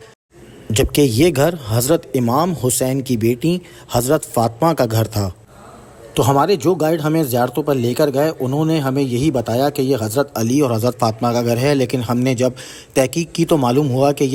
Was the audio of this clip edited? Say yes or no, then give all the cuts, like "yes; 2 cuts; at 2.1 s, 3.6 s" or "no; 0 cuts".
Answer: no; 0 cuts